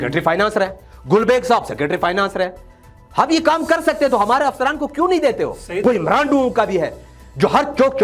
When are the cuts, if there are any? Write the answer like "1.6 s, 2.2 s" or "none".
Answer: 5.7 s